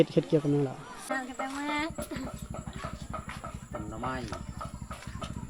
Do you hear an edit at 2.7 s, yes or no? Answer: no